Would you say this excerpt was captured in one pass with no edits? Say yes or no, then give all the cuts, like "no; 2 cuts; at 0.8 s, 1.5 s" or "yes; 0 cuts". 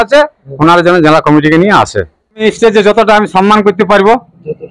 no; 1 cut; at 2.4 s